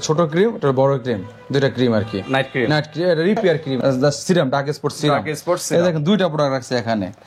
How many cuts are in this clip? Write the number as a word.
one